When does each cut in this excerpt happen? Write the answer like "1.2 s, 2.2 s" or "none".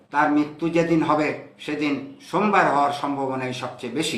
none